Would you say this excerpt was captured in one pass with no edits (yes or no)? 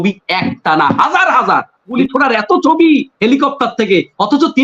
no